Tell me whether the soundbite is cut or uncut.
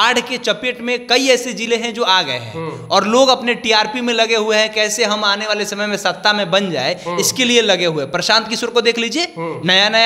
uncut